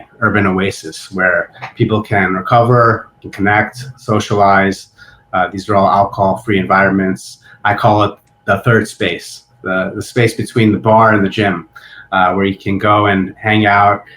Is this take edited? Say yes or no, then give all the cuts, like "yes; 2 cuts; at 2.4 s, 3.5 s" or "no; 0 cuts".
yes; 1 cut; at 3.2 s